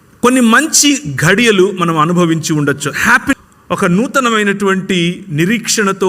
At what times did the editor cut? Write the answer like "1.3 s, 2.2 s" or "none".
3.3 s